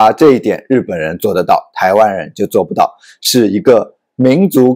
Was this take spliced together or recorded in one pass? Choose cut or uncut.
uncut